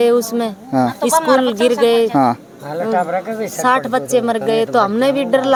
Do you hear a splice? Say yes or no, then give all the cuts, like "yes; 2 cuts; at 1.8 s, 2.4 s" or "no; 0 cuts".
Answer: no; 0 cuts